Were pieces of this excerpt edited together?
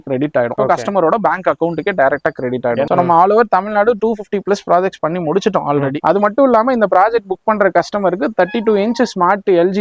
yes; 2 cuts; at 2.9 s, 6.0 s

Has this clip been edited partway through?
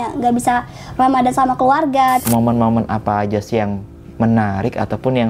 yes; 1 cut; at 2.2 s

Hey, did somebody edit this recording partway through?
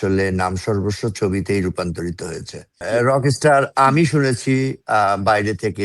yes; 1 cut; at 2.9 s

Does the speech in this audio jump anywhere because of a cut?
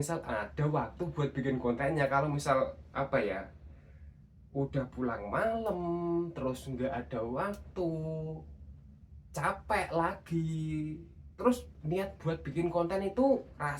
no; 0 cuts

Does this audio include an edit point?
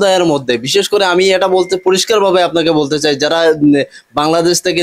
no; 0 cuts

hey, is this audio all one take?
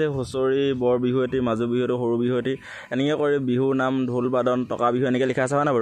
yes; 0 cuts

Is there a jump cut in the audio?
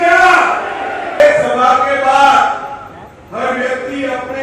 yes; 1 cut; at 1.2 s

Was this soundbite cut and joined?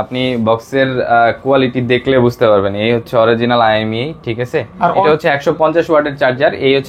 yes; 1 cut; at 5.0 s

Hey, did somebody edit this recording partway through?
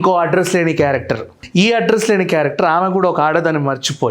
yes; 1 cut; at 1.3 s

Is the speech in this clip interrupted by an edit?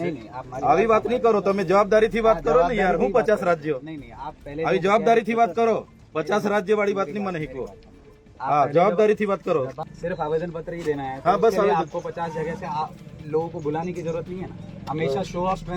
yes; 1 cut; at 9.8 s

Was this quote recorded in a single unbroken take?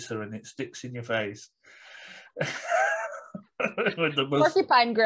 yes; 0 cuts

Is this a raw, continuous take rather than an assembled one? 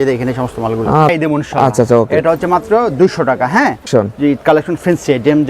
no; 2 cuts; at 1.1 s, 3.9 s

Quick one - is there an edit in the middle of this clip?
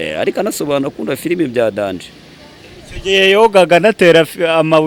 no; 0 cuts

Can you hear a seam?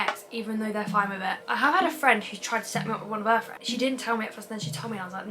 yes; 2 cuts; at 1.5 s, 3.5 s

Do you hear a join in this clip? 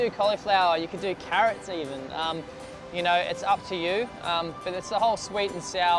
yes; 1 cut; at 3.6 s

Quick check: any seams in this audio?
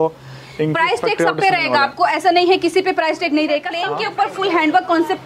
yes; 1 cut; at 3.8 s

